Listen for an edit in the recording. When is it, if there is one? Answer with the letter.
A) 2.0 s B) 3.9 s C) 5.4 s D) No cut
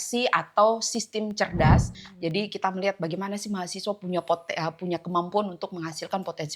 A